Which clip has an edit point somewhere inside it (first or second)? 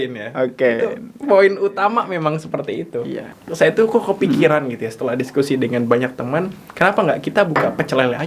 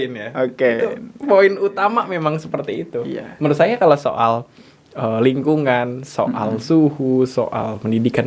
first